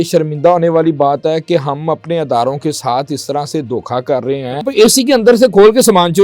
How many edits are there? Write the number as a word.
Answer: one